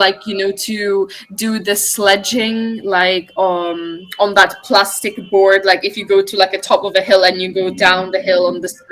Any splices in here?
no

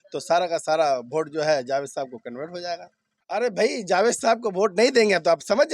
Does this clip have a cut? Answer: yes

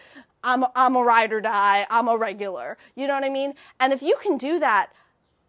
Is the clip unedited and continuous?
yes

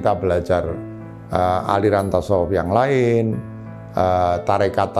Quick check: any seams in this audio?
no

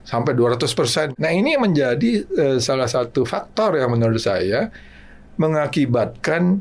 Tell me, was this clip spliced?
yes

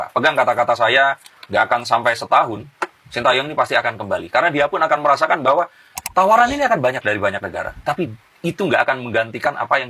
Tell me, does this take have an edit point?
no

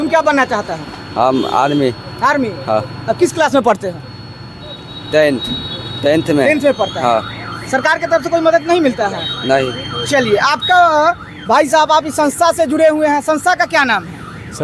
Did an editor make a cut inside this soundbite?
no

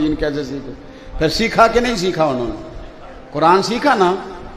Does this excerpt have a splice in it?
no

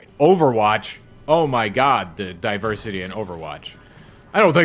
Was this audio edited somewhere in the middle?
no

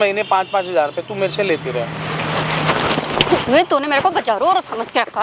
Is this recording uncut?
yes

